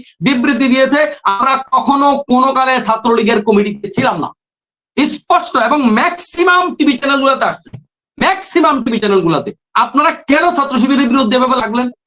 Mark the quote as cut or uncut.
uncut